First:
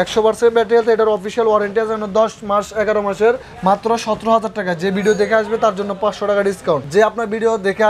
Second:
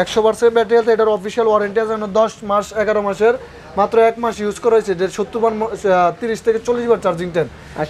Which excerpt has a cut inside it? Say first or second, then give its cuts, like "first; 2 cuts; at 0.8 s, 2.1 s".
first; 2 cuts; at 3.5 s, 6.8 s